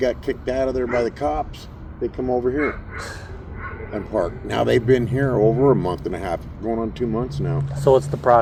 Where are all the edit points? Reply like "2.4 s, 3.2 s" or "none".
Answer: none